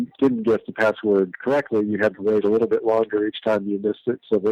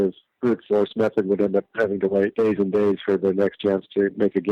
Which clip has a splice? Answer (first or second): second